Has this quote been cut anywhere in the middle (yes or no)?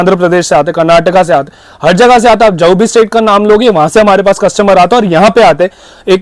no